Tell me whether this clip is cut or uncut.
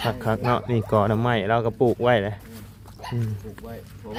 uncut